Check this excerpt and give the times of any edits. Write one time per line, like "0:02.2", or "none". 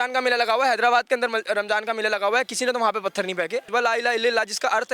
0:03.7